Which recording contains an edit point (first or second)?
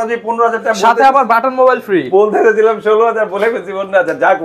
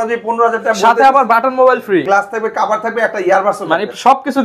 second